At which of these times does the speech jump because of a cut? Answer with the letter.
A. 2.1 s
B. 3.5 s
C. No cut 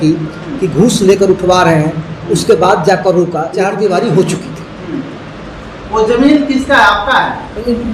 B